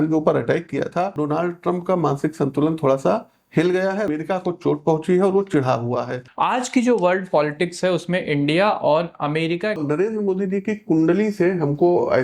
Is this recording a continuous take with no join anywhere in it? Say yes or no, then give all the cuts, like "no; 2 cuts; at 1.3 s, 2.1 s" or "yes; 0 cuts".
no; 4 cuts; at 1.2 s, 4.1 s, 6.2 s, 9.8 s